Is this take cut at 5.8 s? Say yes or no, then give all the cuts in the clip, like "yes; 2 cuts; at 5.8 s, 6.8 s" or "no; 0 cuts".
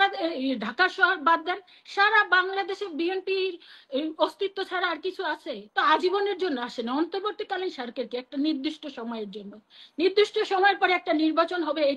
yes; 1 cut; at 5.8 s